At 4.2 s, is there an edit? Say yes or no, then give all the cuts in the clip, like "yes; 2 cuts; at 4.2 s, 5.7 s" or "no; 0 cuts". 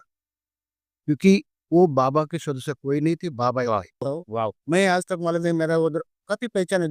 yes; 1 cut; at 4.2 s